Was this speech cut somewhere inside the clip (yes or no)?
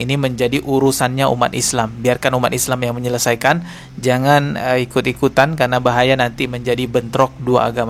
no